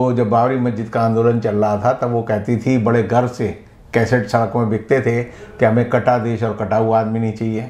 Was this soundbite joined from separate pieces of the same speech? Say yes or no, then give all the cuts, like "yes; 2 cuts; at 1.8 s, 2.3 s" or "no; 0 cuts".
no; 0 cuts